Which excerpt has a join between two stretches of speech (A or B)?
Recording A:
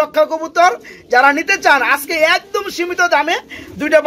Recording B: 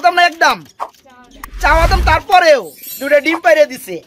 B